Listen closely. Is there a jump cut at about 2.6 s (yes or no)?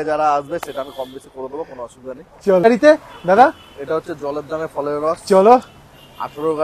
yes